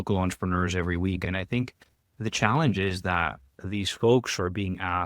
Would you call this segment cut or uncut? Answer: cut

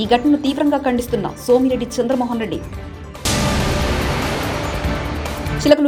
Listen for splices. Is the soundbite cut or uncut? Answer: uncut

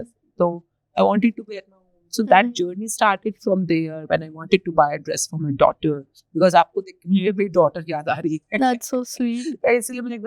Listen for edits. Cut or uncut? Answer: uncut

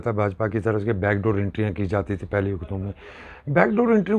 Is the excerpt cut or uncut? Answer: uncut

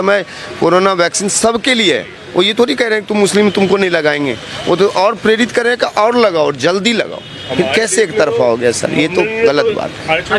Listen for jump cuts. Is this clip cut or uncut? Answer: uncut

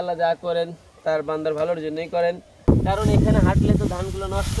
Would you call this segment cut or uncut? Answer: cut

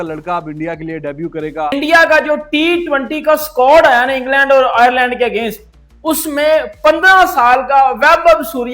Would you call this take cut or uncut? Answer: cut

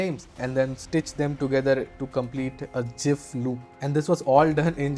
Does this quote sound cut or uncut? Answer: uncut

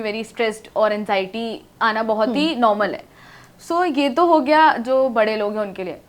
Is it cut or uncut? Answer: uncut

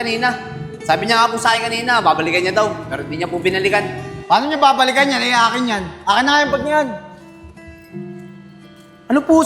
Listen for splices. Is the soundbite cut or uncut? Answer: uncut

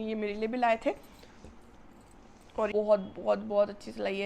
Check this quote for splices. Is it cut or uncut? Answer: cut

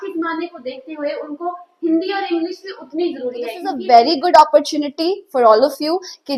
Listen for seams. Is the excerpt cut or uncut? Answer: cut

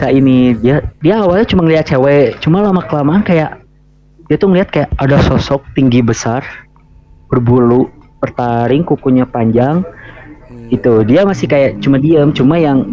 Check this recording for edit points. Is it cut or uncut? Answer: cut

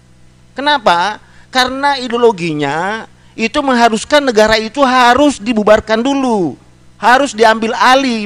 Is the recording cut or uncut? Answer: uncut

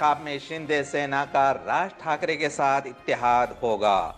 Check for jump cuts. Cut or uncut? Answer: uncut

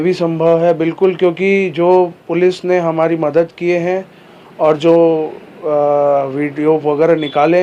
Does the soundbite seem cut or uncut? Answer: uncut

